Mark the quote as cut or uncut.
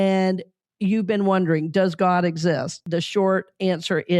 cut